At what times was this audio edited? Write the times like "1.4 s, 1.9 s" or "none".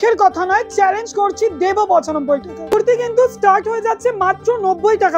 2.7 s